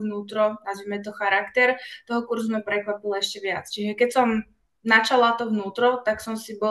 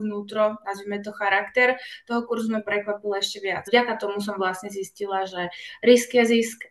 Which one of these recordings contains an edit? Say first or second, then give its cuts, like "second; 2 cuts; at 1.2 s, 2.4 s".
second; 1 cut; at 3.6 s